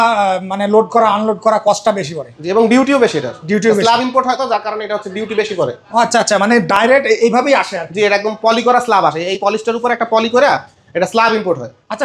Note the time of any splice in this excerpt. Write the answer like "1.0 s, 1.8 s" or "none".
none